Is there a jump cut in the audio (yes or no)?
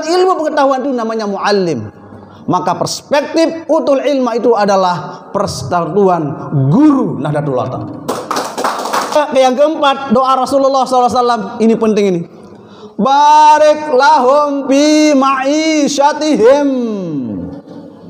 yes